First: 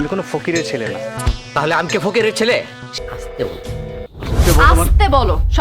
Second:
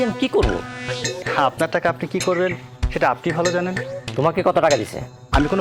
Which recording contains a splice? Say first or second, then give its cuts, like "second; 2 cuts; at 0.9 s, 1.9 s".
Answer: first; 2 cuts; at 1.2 s, 2.9 s